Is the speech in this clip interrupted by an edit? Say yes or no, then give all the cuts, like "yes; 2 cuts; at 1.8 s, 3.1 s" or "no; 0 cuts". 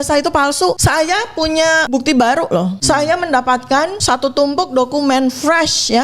yes; 4 cuts; at 0.8 s, 1.8 s, 2.8 s, 4.0 s